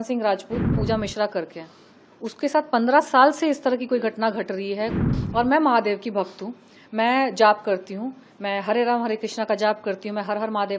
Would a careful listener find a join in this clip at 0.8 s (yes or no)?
yes